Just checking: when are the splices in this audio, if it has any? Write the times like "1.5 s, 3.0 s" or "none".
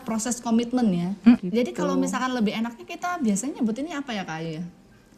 1.4 s